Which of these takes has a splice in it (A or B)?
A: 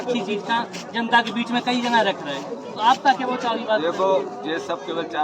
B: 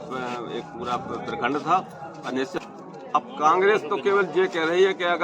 B